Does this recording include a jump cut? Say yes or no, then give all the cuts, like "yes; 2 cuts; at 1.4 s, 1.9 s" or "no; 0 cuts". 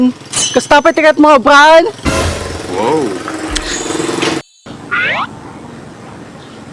no; 0 cuts